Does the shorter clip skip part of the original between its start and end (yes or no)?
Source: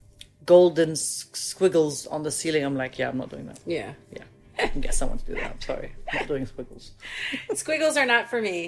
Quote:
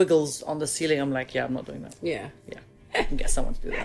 no